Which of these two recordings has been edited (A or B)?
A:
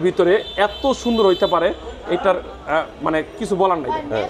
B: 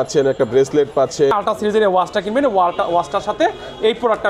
B